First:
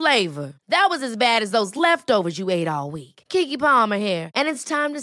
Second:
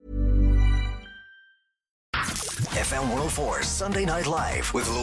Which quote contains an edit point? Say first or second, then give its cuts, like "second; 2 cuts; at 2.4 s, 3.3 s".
second; 1 cut; at 2.1 s